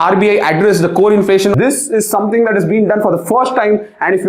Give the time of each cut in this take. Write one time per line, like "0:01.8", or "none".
0:01.5